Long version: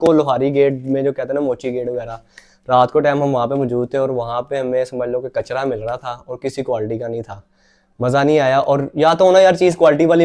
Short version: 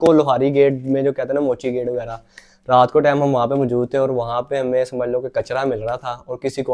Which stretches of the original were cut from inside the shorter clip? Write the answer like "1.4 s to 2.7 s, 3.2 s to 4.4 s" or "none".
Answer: none